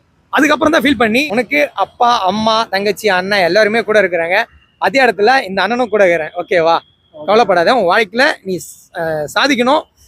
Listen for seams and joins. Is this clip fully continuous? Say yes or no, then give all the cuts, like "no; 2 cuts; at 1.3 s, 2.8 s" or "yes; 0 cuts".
no; 1 cut; at 1.2 s